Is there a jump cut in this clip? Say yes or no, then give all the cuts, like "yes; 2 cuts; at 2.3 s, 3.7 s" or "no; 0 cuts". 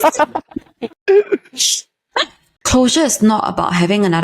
yes; 1 cut; at 2.6 s